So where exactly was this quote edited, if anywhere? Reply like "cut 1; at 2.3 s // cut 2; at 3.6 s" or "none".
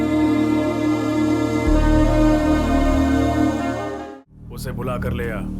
cut 1; at 4.0 s